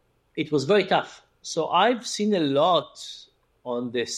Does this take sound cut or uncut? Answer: uncut